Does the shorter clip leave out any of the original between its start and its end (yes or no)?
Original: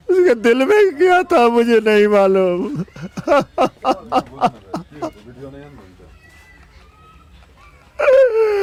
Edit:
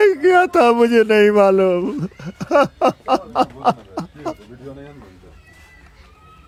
no